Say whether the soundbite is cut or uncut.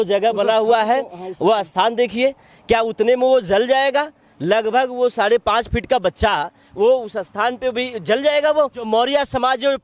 cut